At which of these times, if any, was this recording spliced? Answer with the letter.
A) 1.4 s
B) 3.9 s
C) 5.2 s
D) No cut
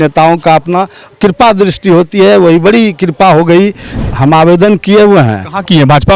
B